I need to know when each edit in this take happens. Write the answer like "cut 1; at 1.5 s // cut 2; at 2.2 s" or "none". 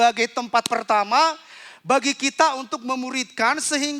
none